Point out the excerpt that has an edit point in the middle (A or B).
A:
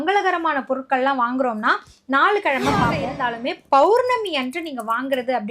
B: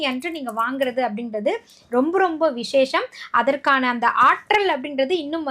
A